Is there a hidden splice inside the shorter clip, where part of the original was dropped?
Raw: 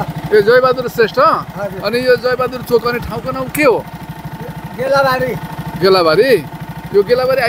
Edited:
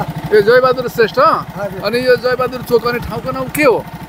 no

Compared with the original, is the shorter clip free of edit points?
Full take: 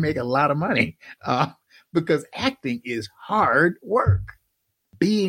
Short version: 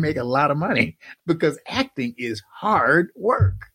no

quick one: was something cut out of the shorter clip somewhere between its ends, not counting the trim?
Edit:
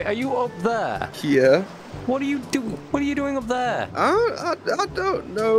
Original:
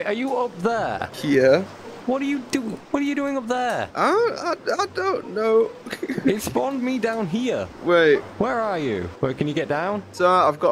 no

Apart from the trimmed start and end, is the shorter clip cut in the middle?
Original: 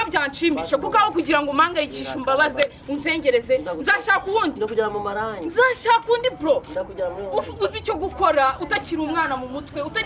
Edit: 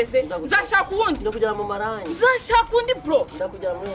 no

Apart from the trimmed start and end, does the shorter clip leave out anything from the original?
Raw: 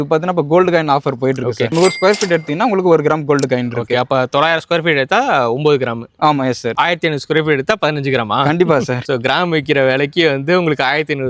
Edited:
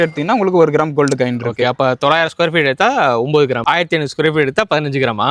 yes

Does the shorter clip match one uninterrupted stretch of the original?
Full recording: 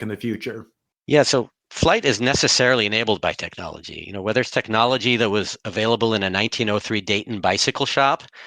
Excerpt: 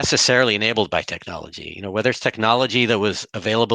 yes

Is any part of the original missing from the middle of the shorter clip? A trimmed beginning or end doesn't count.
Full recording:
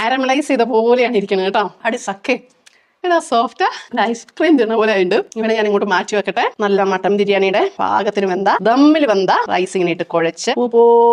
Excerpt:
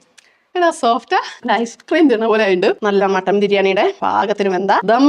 yes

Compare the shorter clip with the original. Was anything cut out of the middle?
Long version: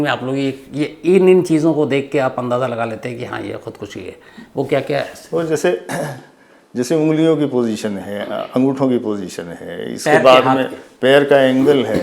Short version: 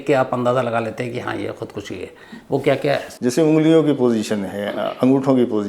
yes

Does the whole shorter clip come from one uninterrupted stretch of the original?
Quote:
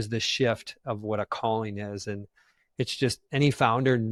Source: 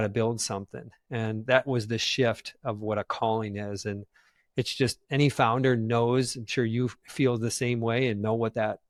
yes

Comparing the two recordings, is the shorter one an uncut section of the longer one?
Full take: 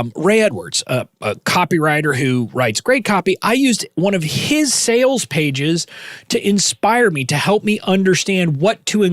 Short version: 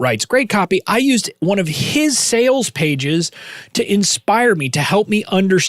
yes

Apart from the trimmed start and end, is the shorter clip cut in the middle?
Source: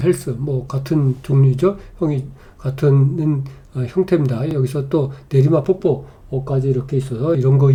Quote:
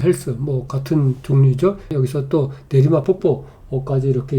yes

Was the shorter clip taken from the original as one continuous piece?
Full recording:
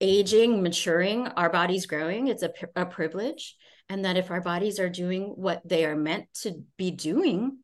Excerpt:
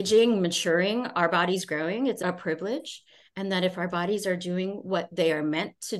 no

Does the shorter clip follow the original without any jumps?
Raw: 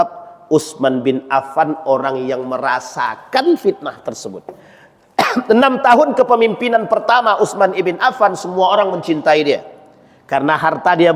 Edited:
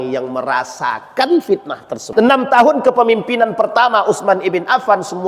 no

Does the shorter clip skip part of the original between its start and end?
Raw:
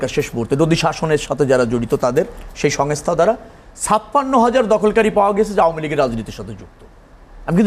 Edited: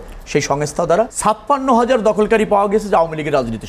yes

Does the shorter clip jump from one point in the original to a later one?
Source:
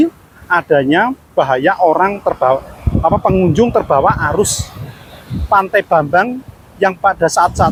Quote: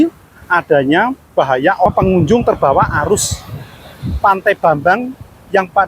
yes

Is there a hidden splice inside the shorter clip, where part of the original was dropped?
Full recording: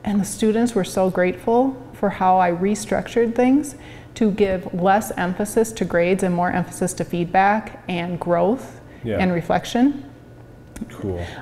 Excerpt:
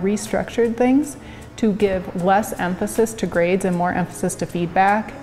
no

